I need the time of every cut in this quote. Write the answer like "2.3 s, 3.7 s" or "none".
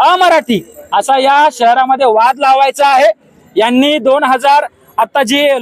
none